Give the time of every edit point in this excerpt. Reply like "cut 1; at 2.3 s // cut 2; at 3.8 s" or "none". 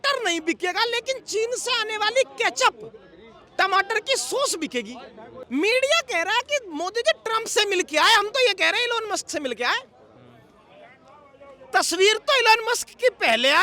cut 1; at 5.3 s